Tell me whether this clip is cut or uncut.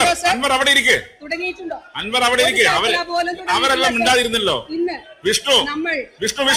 uncut